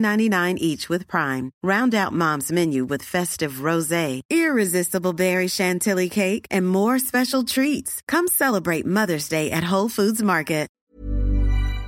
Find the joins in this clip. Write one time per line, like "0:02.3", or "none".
0:10.8